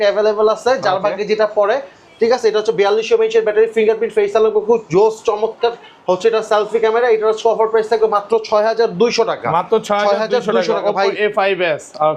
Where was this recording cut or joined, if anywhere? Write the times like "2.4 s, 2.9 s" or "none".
none